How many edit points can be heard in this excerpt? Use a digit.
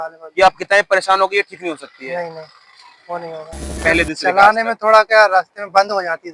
1